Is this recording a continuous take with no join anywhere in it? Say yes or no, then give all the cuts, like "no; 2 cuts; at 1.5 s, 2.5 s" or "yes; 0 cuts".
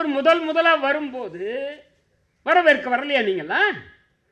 yes; 0 cuts